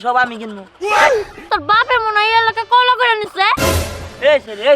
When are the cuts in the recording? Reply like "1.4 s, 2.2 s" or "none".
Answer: 1.4 s, 3.6 s